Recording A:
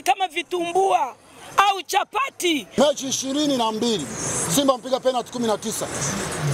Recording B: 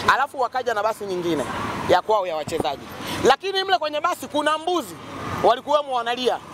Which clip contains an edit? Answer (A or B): A